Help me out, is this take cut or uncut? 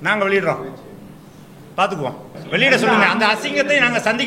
cut